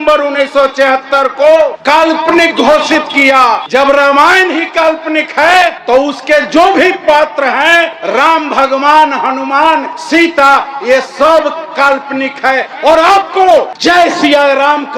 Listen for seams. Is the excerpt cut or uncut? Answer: cut